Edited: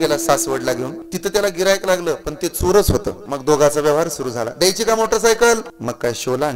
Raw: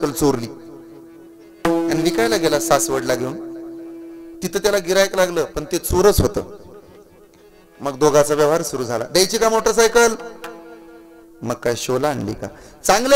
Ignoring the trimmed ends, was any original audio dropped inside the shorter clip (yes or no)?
yes